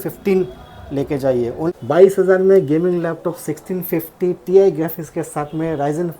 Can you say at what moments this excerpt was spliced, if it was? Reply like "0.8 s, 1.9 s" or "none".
1.7 s

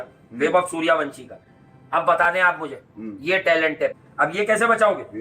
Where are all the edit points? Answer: 4.0 s

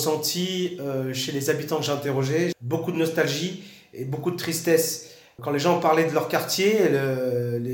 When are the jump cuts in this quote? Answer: 2.6 s, 5.3 s

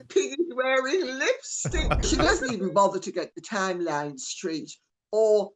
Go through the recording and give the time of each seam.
2.1 s

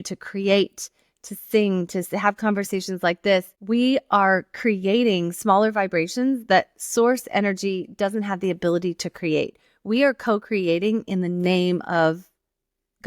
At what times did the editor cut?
3.5 s

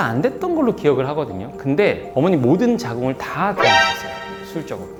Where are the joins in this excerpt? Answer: none

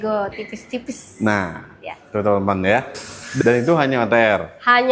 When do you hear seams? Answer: 3.4 s

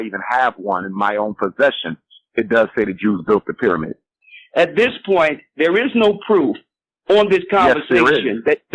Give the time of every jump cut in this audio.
4.2 s

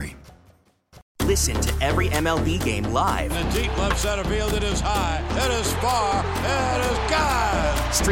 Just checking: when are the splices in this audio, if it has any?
1.0 s

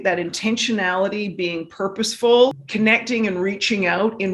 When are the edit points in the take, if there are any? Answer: 2.6 s

